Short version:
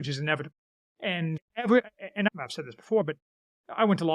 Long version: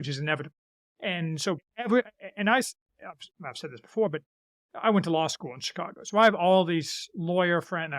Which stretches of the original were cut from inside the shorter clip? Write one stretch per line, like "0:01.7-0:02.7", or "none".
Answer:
0:01.4-0:01.6
0:02.5-0:03.3